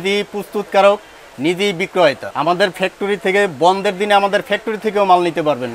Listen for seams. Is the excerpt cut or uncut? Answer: cut